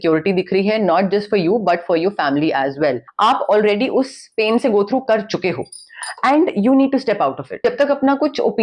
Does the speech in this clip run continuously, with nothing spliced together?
no; 2 cuts; at 3.1 s, 7.6 s

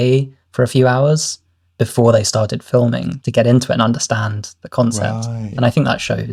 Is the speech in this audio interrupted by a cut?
no; 0 cuts

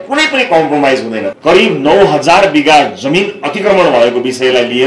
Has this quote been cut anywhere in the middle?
yes; 1 cut; at 1.3 s

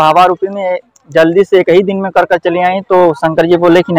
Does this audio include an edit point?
no; 0 cuts

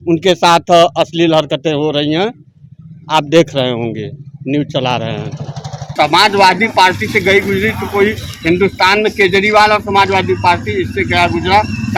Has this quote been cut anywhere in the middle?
no; 0 cuts

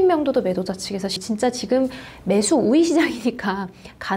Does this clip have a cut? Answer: yes; 1 cut; at 1.1 s

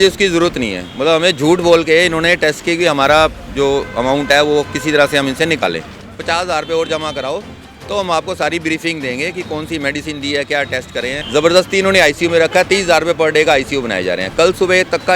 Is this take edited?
yes; 2 cuts; at 6.1 s, 11.2 s

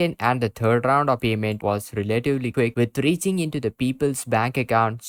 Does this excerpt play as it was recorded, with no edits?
yes; 0 cuts

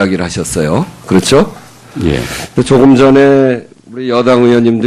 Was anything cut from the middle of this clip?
no; 0 cuts

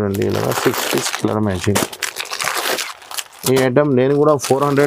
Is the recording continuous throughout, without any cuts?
yes; 0 cuts

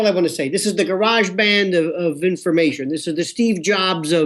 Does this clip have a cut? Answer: yes; 1 cut; at 2.8 s

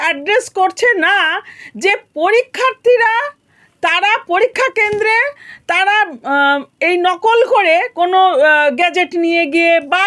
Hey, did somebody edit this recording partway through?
no; 0 cuts

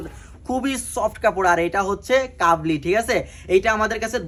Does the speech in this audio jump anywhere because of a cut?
no; 0 cuts

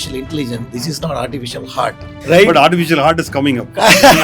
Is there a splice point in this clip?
yes; 1 cut; at 2.1 s

